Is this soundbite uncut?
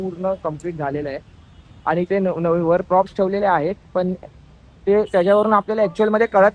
yes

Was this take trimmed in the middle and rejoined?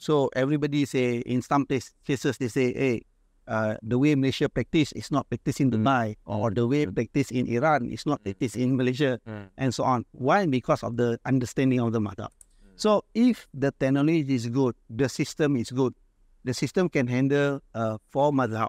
no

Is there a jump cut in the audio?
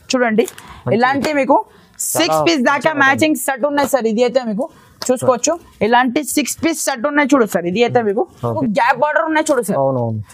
yes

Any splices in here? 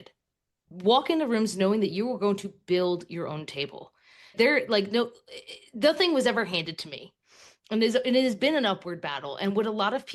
no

